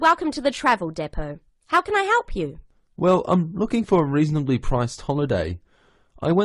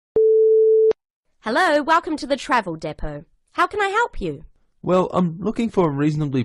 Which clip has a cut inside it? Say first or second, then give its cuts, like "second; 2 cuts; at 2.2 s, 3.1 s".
second; 1 cut; at 0.9 s